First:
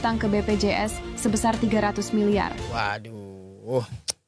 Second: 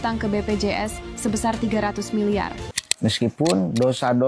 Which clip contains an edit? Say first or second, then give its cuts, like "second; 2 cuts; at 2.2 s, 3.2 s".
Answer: second; 1 cut; at 2.8 s